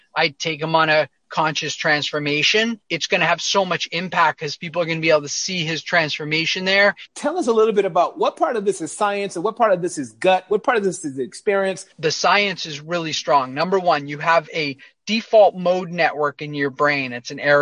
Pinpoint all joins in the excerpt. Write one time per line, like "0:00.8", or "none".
0:02.9
0:07.1
0:12.0